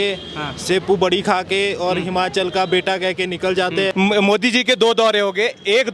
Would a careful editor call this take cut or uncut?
cut